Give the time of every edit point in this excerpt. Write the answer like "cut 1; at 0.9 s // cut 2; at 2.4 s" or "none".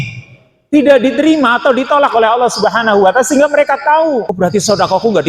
cut 1; at 4.3 s